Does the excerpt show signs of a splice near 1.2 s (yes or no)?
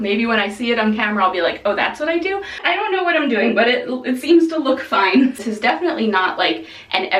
no